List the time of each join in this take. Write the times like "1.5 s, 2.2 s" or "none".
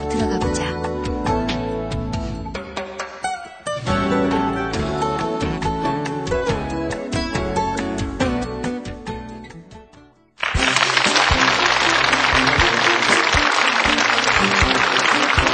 none